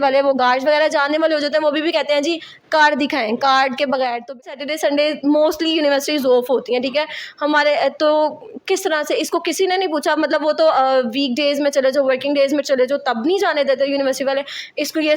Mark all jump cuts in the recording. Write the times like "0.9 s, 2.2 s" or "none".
4.5 s